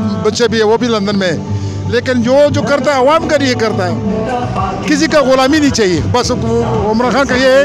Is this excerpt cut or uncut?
cut